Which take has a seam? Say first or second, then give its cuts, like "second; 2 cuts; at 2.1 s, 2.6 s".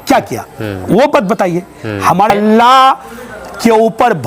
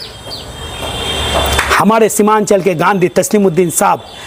first; 1 cut; at 2.3 s